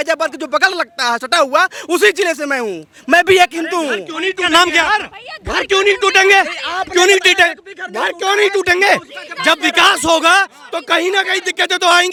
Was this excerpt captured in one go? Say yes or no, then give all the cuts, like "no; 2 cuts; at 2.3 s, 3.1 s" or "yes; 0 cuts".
yes; 0 cuts